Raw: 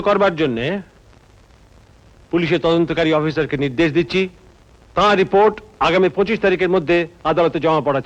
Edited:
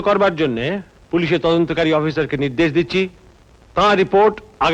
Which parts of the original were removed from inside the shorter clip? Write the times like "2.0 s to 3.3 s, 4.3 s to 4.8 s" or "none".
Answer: 0.9 s to 2.1 s